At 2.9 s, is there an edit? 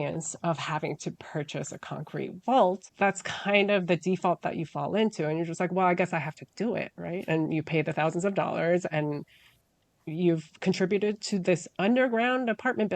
yes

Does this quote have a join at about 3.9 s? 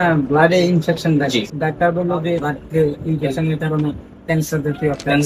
no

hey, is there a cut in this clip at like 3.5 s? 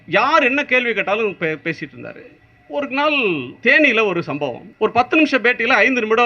yes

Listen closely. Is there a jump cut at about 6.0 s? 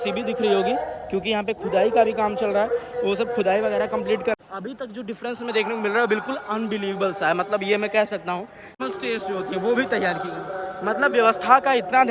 no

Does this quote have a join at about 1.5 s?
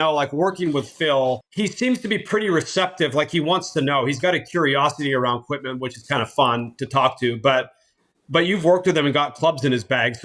yes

